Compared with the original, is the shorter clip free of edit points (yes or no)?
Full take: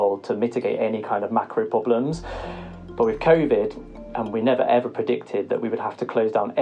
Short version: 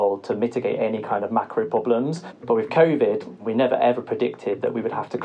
no